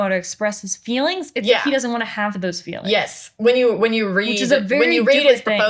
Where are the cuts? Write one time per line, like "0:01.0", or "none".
none